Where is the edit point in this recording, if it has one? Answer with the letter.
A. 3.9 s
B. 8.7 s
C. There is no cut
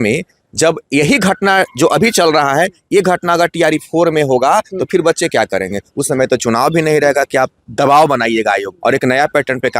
B